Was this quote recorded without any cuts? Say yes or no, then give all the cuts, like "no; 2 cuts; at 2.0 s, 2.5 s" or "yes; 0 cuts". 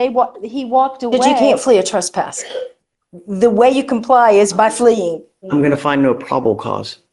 no; 2 cuts; at 1.4 s, 5.3 s